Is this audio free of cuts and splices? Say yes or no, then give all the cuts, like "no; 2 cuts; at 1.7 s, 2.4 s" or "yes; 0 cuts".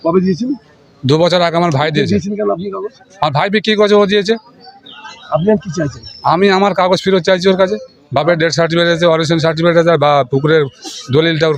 yes; 0 cuts